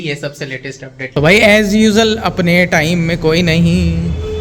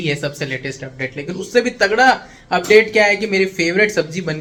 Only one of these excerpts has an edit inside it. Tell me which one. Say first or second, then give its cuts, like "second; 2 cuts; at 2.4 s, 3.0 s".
first; 1 cut; at 1.1 s